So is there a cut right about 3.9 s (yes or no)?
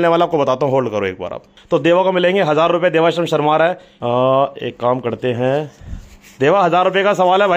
yes